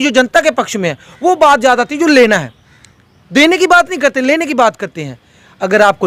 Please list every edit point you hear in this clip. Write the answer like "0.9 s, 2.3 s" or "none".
none